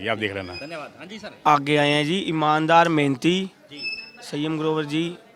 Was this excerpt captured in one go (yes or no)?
no